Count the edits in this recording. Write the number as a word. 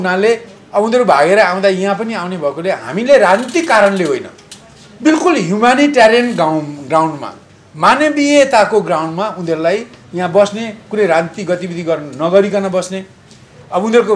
zero